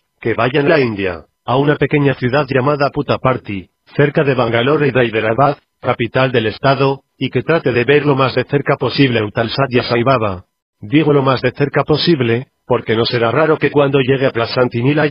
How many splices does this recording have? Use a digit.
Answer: 1